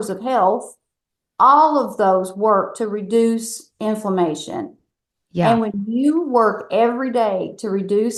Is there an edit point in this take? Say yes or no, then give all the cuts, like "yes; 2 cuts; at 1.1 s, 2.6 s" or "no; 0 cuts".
no; 0 cuts